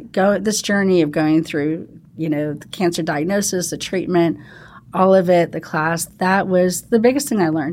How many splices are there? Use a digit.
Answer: 0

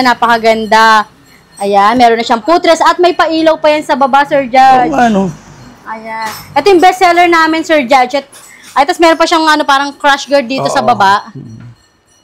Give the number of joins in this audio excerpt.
0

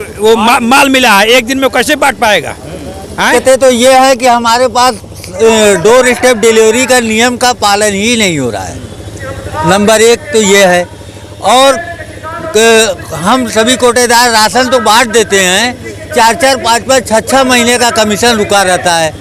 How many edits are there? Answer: 1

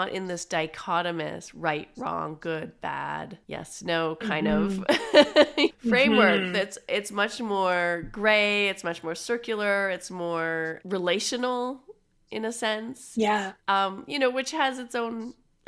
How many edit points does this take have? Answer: 3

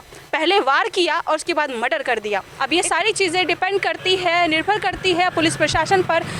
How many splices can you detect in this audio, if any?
1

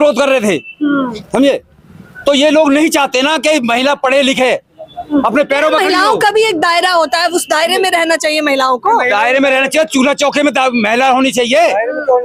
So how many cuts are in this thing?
0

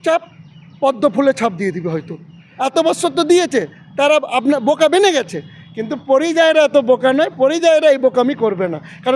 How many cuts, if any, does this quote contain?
1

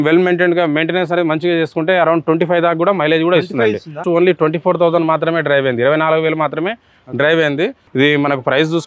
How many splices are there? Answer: 2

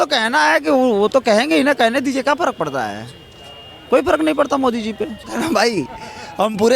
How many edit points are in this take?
1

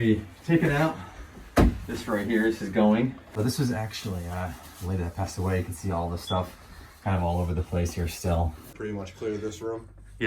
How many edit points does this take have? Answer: 2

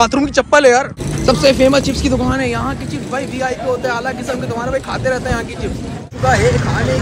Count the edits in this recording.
2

